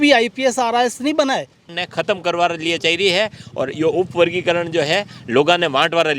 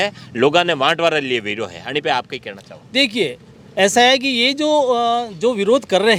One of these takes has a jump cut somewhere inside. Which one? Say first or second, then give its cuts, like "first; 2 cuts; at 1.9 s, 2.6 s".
first; 1 cut; at 1.6 s